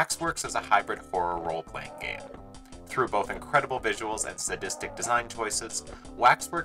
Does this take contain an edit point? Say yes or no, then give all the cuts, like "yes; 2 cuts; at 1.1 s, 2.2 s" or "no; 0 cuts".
no; 0 cuts